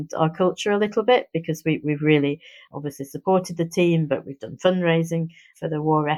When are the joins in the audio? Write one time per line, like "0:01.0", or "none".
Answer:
none